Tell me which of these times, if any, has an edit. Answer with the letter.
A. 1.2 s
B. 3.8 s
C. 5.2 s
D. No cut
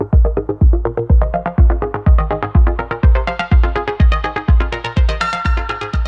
D